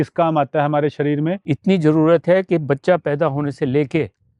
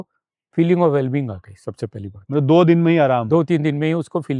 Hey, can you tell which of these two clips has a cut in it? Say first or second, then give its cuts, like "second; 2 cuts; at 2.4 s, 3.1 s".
first; 1 cut; at 1.5 s